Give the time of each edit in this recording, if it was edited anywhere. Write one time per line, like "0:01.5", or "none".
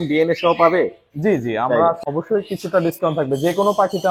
0:02.0